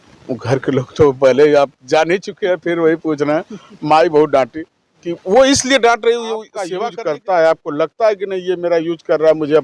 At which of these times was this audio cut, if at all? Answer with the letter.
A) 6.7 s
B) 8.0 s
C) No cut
A